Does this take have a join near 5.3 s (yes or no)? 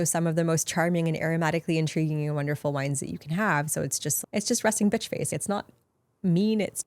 yes